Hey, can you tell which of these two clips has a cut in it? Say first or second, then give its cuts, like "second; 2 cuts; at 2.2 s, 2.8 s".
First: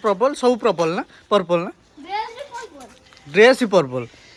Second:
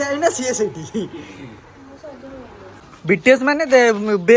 second; 1 cut; at 2.9 s